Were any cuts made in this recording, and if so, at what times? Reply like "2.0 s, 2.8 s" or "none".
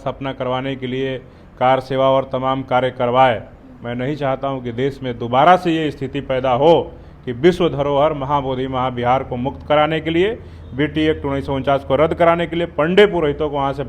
none